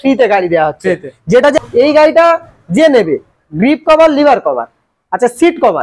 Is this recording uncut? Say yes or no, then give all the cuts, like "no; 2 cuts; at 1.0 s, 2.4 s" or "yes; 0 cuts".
no; 1 cut; at 1.5 s